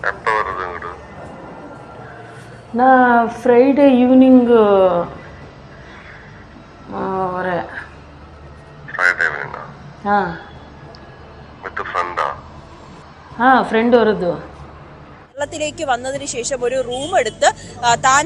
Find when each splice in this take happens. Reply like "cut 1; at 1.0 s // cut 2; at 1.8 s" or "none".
cut 1; at 15.4 s